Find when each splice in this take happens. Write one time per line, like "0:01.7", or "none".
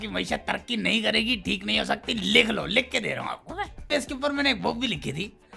0:03.9